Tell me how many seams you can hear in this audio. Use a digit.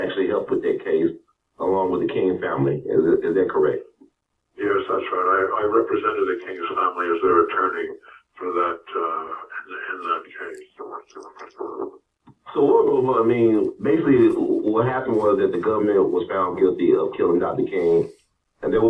0